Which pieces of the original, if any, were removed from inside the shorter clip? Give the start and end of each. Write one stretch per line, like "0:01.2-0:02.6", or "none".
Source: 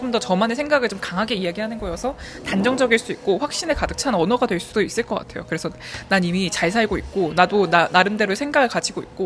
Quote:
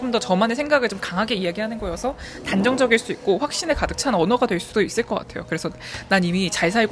none